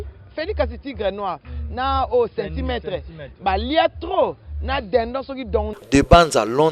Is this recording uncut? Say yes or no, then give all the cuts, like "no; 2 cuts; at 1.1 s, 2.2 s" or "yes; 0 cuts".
no; 1 cut; at 5.8 s